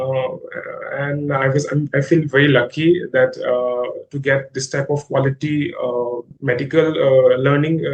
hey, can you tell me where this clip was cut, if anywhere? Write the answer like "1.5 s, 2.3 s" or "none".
6.3 s